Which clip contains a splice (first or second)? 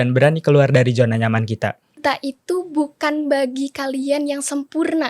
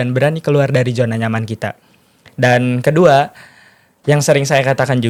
first